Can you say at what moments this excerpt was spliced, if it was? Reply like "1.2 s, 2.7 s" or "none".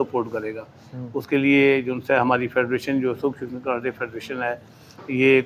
none